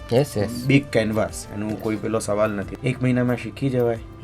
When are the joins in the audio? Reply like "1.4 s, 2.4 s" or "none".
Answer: 2.7 s